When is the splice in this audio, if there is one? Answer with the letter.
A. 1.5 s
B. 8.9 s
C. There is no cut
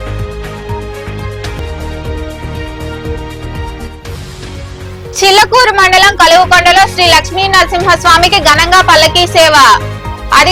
C